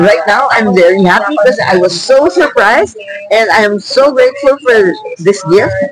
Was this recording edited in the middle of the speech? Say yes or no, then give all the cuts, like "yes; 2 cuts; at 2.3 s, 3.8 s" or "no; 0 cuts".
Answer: no; 0 cuts